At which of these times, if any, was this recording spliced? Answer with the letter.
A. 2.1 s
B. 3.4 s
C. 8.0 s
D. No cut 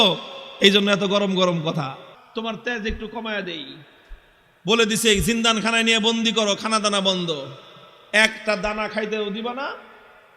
A